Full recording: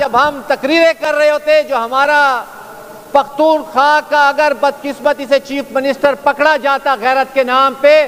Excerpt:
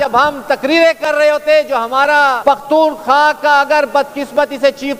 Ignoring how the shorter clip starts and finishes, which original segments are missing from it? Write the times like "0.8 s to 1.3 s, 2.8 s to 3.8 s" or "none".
2.4 s to 3.1 s